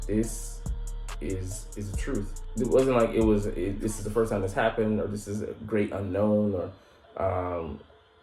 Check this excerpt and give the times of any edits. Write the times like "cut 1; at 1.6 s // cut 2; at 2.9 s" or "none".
cut 1; at 2.4 s

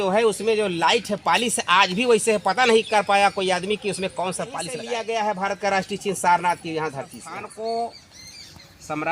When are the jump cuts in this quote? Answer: cut 1; at 4.8 s // cut 2; at 7.5 s

